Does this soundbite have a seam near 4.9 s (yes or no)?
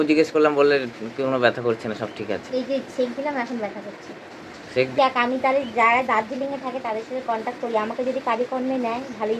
yes